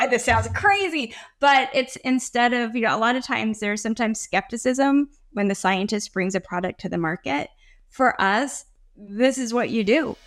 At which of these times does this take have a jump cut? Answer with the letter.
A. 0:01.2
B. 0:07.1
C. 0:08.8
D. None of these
D